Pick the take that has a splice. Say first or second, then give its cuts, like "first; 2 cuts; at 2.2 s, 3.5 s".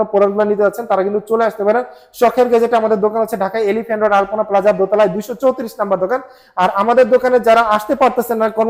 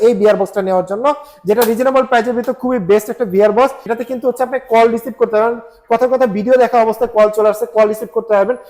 second; 1 cut; at 3.9 s